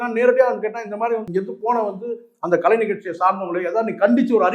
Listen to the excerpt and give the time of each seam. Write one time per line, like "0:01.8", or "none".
0:01.3